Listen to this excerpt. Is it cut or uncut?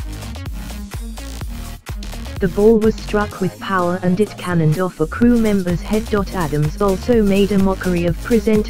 uncut